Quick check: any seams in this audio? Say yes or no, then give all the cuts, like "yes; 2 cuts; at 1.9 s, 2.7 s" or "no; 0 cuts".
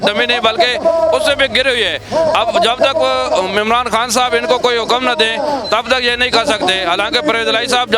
no; 0 cuts